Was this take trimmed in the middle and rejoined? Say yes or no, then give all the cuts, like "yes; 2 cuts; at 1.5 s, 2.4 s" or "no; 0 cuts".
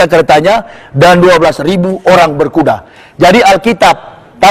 no; 0 cuts